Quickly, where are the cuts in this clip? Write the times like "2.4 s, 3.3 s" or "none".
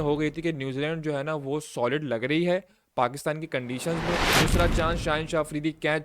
4.3 s